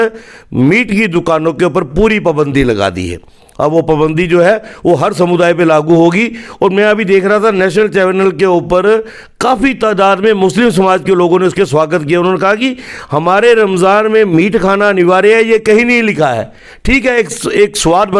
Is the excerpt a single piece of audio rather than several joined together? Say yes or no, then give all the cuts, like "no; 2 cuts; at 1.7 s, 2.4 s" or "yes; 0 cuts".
yes; 0 cuts